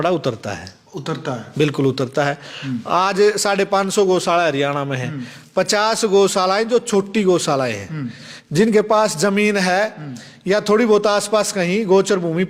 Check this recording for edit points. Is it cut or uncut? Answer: uncut